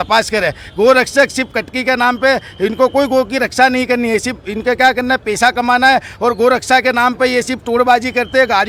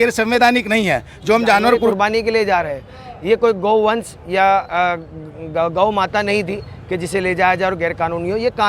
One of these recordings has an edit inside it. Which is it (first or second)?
second